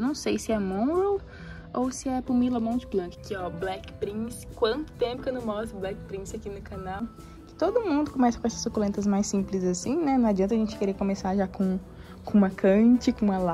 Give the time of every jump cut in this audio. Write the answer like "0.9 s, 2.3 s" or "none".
3.2 s, 7.1 s